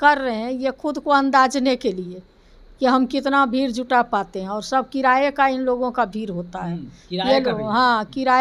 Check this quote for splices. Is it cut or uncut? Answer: uncut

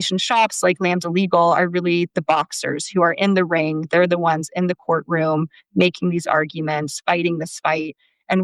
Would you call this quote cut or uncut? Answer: uncut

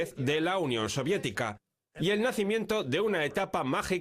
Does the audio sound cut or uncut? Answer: cut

